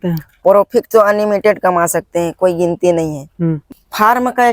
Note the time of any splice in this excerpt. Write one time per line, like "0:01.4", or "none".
0:03.6